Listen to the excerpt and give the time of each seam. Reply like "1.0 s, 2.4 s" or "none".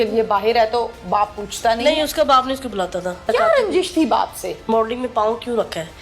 3.3 s, 4.7 s